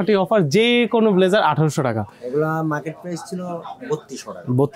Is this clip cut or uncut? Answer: uncut